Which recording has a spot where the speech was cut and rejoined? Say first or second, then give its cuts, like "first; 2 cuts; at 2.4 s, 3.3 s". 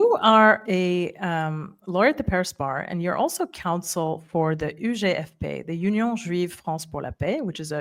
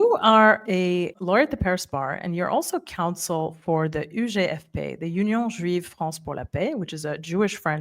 second; 1 cut; at 1.1 s